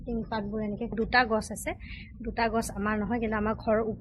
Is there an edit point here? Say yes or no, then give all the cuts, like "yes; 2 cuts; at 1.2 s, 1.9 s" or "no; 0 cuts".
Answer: yes; 1 cut; at 1.0 s